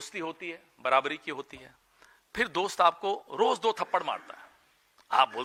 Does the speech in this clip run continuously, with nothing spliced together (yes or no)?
yes